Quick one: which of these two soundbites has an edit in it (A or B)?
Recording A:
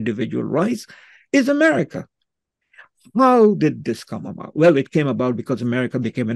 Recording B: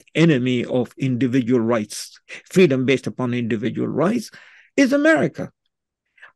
B